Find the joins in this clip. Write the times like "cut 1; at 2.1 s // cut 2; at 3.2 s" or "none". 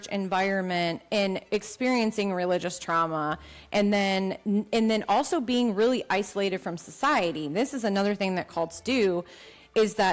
none